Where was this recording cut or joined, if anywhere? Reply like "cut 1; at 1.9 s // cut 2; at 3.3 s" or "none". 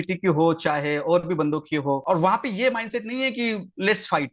cut 1; at 2.0 s